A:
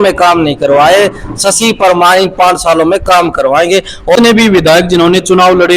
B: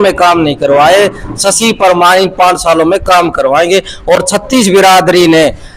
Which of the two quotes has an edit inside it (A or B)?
A